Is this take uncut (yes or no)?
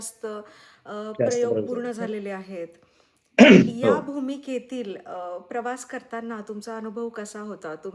yes